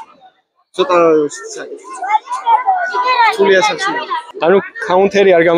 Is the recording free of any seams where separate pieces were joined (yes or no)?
yes